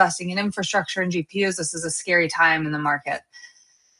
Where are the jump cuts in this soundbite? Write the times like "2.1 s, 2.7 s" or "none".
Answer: none